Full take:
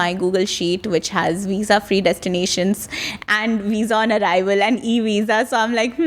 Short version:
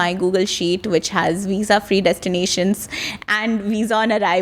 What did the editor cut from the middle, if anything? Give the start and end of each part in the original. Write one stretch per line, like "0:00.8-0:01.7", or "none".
none